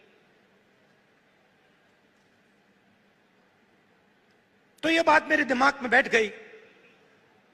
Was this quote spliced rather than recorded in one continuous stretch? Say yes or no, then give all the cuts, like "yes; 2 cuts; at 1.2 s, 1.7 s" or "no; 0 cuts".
no; 0 cuts